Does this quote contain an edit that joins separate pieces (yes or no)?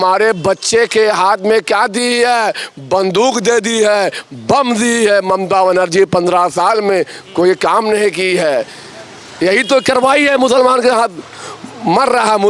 no